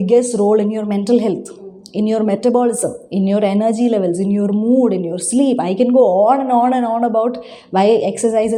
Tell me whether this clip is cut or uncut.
uncut